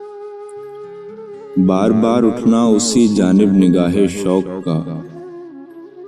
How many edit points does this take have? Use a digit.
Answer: 1